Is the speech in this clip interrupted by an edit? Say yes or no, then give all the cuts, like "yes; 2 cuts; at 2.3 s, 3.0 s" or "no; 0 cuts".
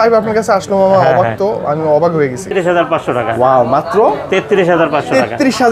yes; 1 cut; at 2.5 s